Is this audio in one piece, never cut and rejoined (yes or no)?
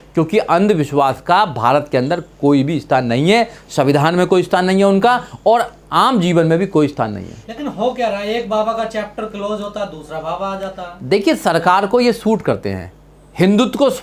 yes